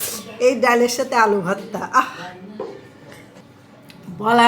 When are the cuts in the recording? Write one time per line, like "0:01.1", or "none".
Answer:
none